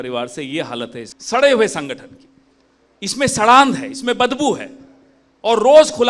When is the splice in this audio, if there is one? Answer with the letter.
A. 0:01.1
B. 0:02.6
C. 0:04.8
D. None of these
A